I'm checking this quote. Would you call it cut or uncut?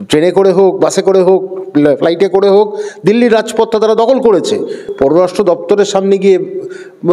cut